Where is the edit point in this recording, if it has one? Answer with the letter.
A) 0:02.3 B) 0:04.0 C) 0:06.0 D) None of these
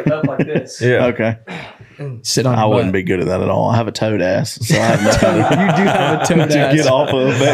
A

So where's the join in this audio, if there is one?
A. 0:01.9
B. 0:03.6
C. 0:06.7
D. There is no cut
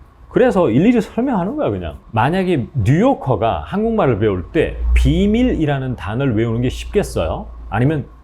A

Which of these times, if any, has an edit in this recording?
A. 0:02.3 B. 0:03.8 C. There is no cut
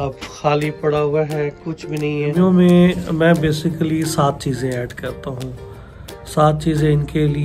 A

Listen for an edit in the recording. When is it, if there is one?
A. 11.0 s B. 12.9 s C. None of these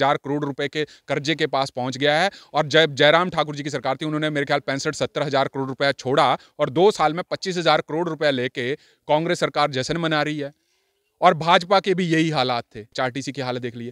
B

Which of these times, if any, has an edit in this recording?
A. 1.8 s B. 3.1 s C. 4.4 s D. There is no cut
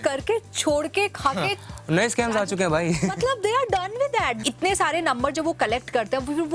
C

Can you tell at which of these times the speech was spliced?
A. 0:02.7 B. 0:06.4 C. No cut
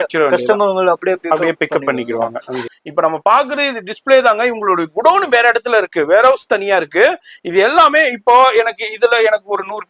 A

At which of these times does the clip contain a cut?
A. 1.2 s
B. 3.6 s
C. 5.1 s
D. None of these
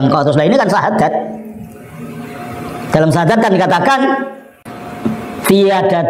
A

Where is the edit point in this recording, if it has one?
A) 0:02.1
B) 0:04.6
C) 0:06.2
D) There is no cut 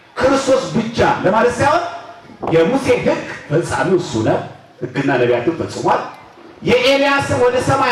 D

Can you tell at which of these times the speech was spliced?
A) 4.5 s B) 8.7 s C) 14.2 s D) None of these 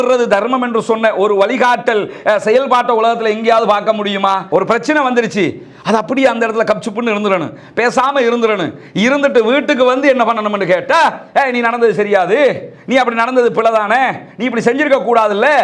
A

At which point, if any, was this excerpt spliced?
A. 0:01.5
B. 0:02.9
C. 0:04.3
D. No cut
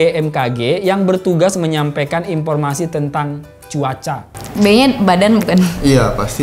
C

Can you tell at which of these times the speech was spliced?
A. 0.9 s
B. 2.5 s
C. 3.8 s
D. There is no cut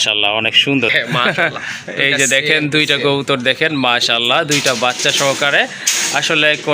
A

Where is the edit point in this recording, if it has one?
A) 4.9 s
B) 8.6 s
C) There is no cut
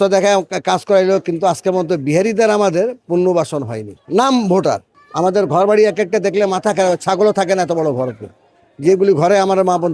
A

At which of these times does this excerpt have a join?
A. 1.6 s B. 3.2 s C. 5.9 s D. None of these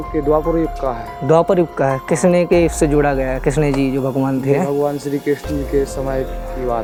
D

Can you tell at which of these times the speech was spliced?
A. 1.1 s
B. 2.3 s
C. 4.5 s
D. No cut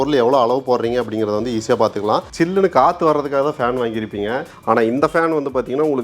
B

